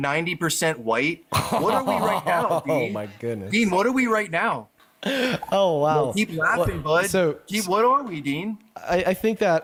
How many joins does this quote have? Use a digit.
0